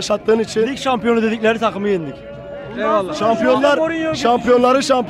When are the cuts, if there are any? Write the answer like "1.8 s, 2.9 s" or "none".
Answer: none